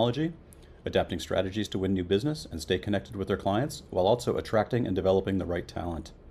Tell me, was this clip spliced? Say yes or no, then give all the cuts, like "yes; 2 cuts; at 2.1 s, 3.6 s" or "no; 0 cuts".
no; 0 cuts